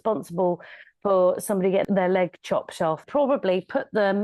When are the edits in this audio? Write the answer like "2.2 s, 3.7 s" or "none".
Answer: 1.8 s, 3.0 s

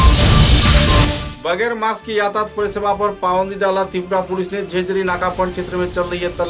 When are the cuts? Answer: 1.2 s

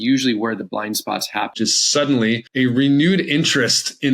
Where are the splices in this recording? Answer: 1.5 s, 2.5 s

